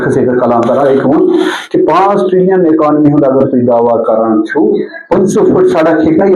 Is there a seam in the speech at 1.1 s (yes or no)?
yes